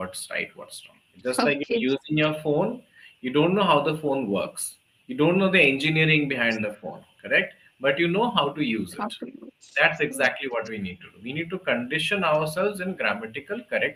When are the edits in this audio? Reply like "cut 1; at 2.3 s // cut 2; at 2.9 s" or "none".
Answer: none